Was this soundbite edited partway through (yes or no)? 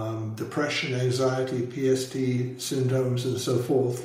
no